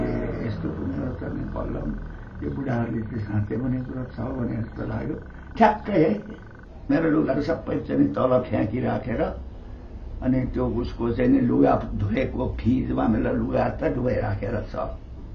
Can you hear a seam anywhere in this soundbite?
yes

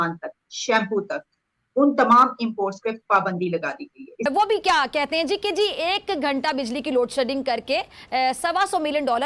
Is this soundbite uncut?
no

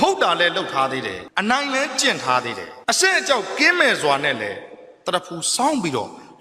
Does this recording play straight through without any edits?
no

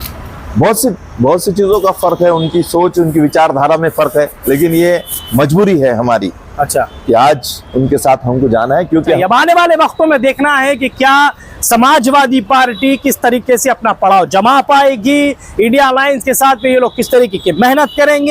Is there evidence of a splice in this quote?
yes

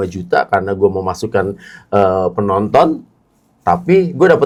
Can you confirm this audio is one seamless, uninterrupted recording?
yes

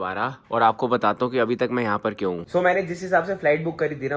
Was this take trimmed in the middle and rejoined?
no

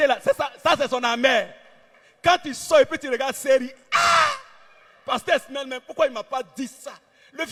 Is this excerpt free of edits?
yes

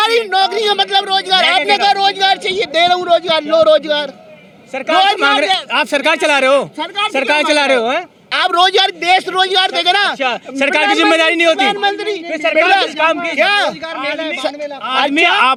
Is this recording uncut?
yes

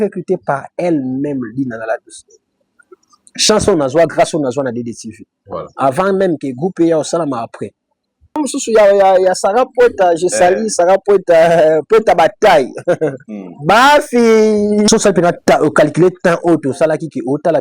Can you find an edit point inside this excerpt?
yes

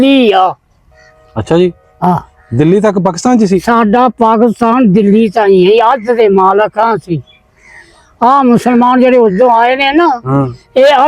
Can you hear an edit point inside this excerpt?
no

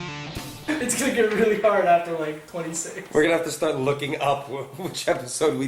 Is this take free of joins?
yes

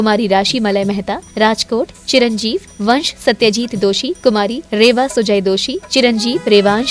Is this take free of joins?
yes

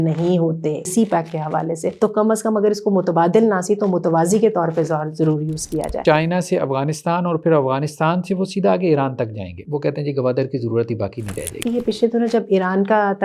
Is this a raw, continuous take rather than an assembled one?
no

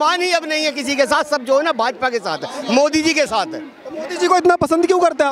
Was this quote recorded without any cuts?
yes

